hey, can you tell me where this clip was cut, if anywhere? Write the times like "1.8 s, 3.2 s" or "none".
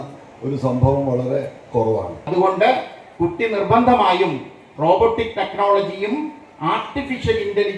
2.3 s